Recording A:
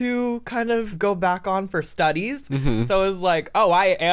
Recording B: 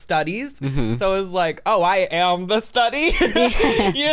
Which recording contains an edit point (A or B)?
A